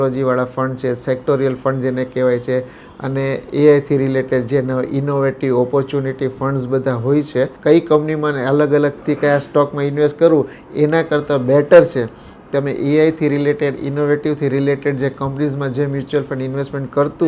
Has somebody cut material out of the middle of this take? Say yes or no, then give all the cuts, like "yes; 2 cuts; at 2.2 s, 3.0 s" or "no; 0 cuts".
yes; 1 cut; at 7.6 s